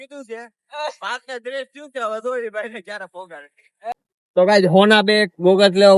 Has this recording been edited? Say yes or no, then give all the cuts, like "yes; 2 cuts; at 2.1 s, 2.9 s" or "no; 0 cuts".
yes; 1 cut; at 3.9 s